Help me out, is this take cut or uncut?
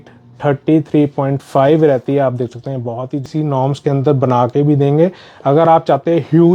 cut